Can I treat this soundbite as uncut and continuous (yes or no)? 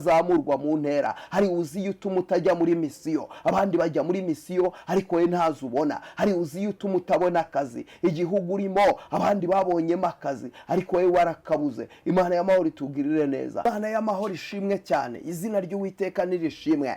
no